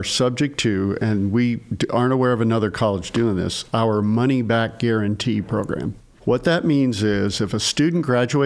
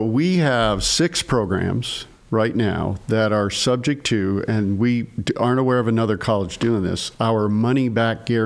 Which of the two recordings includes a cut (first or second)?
first